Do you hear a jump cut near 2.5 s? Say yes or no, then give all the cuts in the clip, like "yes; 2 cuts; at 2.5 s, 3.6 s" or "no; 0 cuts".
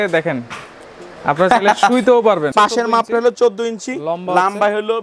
yes; 1 cut; at 2.5 s